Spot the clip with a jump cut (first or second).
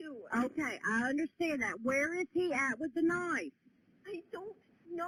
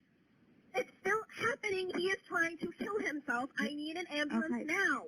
second